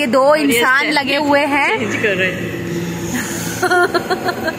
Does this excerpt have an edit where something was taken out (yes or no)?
no